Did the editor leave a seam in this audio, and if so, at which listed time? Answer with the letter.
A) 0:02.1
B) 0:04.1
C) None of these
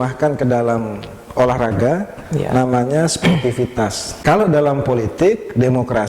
B